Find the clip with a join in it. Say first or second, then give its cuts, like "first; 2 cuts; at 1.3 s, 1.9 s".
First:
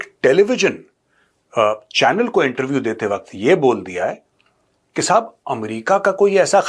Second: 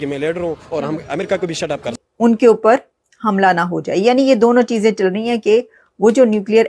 second; 1 cut; at 2.0 s